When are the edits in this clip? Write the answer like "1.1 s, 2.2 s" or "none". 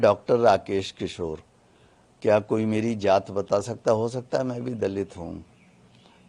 none